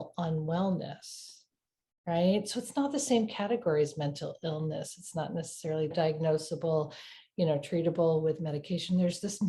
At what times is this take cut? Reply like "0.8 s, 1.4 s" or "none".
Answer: 5.9 s